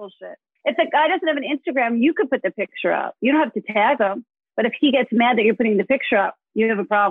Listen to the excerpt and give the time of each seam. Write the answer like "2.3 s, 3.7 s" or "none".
none